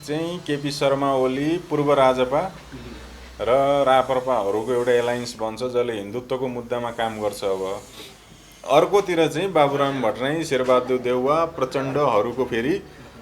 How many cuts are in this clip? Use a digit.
1